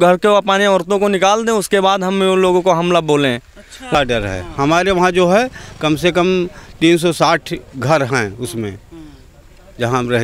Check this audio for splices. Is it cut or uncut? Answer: cut